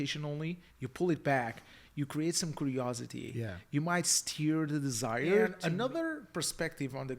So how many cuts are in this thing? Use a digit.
1